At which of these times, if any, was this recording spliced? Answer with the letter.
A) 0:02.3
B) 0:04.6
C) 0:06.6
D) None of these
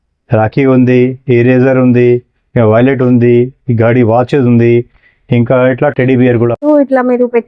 C